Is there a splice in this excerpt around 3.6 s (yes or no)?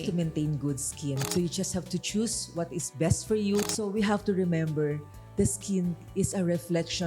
yes